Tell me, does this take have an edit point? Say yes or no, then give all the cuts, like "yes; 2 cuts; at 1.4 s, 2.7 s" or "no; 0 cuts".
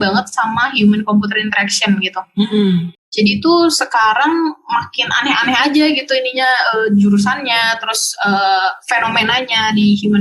yes; 1 cut; at 3.0 s